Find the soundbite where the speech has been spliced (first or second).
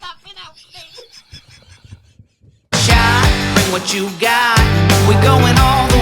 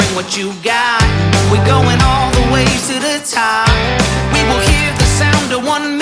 first